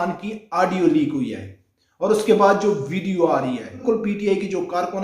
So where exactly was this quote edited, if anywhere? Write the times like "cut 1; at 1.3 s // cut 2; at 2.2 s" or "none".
cut 1; at 3.8 s